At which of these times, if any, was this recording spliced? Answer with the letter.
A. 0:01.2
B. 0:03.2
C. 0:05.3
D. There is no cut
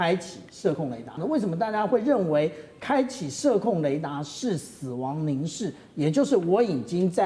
A